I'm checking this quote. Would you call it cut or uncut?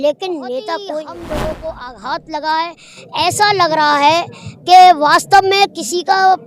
cut